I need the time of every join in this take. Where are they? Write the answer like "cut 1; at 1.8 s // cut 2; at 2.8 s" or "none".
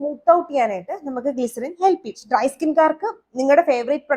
cut 1; at 2.2 s